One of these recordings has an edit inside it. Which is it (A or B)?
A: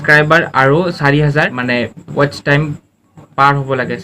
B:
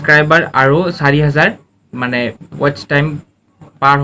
A